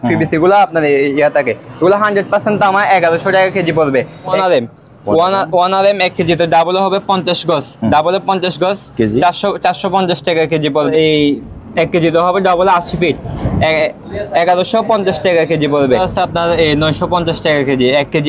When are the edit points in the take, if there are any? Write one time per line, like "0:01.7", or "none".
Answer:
0:04.4
0:10.9
0:16.1